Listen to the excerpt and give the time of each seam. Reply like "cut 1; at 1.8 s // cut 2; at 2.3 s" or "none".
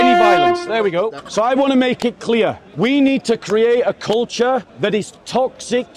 cut 1; at 1.2 s // cut 2; at 2.6 s // cut 3; at 4.7 s